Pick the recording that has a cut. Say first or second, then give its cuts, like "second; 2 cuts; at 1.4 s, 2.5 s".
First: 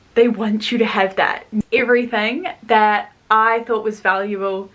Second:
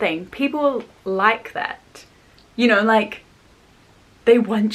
first; 1 cut; at 1.6 s